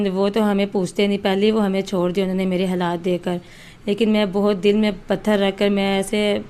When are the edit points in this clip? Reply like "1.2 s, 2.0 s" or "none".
none